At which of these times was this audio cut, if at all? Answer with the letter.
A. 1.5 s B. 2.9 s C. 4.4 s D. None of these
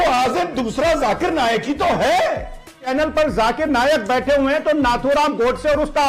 B